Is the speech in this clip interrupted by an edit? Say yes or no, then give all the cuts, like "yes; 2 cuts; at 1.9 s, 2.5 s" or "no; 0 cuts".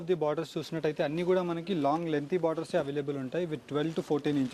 no; 0 cuts